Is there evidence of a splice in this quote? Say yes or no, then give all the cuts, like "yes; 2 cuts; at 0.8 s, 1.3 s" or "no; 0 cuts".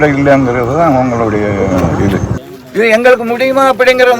yes; 1 cut; at 2.4 s